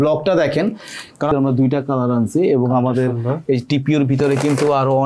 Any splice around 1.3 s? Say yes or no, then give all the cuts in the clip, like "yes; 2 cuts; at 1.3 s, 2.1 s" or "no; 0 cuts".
yes; 1 cut; at 1.3 s